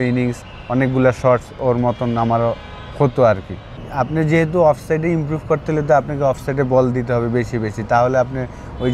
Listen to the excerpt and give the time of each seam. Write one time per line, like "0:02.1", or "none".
0:03.8